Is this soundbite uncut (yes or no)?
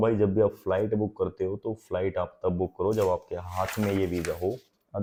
yes